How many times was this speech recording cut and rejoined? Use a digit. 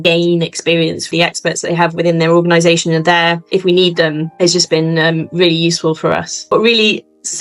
3